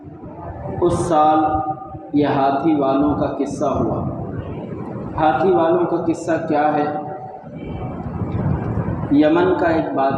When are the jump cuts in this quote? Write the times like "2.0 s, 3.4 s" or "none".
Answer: none